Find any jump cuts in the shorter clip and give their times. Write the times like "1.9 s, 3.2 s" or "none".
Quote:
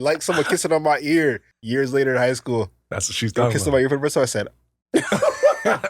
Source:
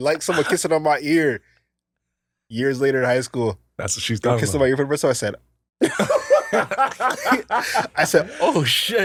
1.5 s